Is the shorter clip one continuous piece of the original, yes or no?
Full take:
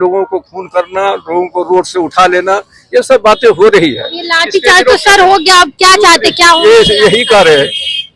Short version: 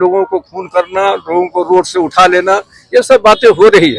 yes